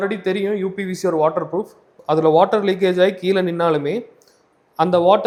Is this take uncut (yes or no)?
yes